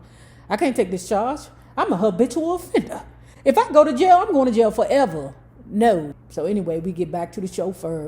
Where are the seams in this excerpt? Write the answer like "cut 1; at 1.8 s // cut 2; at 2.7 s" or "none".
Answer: cut 1; at 6.2 s